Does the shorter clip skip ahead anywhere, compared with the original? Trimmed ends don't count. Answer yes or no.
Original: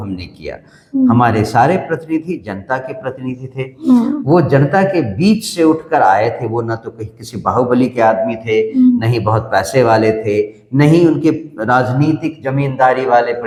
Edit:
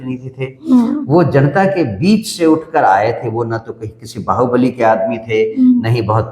no